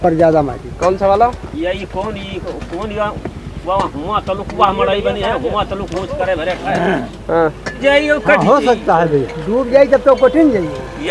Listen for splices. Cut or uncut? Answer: cut